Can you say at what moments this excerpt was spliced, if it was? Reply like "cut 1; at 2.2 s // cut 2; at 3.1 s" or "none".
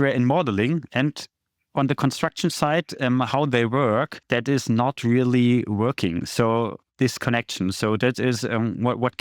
cut 1; at 4.2 s